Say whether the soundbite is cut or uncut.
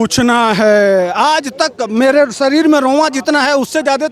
uncut